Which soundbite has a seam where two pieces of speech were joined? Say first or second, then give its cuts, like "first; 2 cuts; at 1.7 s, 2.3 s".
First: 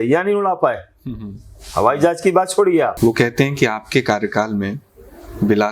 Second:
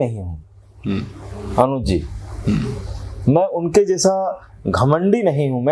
first; 1 cut; at 2.9 s